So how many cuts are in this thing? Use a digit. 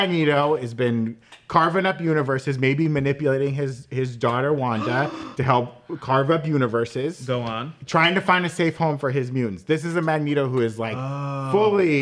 0